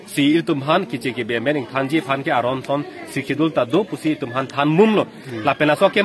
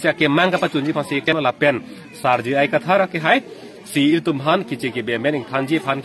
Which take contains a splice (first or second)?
second